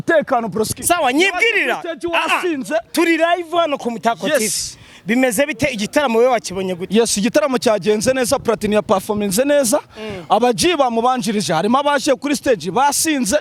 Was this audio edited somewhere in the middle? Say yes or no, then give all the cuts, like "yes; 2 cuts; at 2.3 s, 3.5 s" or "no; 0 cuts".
no; 0 cuts